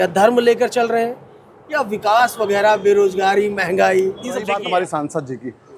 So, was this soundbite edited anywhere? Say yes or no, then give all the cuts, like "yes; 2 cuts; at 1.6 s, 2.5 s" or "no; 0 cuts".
yes; 1 cut; at 4.5 s